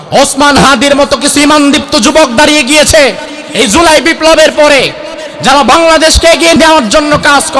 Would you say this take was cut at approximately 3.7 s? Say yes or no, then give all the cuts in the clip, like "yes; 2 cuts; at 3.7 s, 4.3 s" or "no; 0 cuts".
no; 1 cut; at 6.6 s